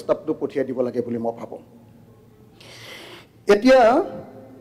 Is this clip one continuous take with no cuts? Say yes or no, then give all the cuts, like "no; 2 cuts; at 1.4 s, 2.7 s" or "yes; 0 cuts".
yes; 0 cuts